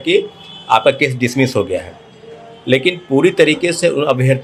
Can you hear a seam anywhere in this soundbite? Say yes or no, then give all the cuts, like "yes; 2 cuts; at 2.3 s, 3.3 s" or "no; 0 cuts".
no; 0 cuts